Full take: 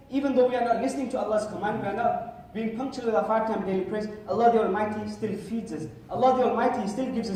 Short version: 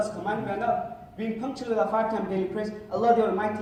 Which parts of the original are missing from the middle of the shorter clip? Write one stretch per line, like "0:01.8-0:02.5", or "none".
none